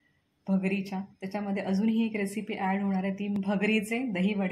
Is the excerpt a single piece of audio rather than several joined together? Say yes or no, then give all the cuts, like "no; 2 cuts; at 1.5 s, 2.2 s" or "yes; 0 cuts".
no; 1 cut; at 3.3 s